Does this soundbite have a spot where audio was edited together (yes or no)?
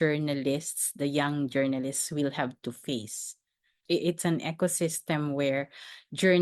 no